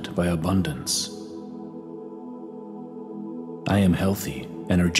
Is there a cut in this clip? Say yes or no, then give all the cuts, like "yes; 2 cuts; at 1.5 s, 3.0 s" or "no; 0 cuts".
yes; 2 cuts; at 1.2 s, 3.6 s